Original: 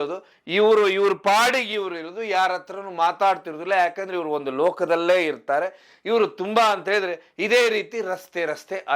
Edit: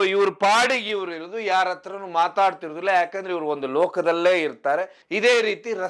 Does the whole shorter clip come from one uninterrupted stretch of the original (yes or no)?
no